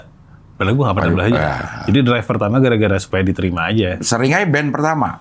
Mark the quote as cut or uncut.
cut